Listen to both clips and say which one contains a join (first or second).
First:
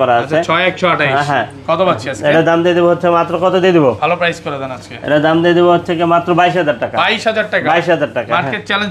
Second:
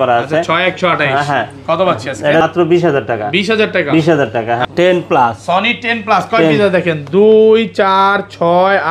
second